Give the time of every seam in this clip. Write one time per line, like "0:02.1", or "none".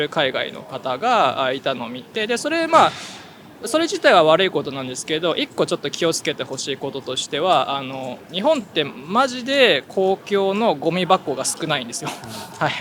none